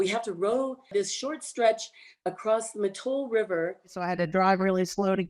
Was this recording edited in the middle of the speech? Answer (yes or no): yes